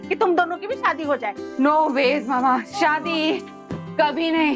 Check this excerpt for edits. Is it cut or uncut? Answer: uncut